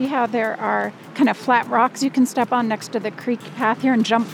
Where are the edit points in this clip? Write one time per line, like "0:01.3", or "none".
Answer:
0:01.0